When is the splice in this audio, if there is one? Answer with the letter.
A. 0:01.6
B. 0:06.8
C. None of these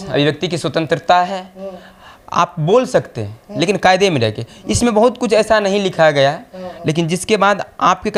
C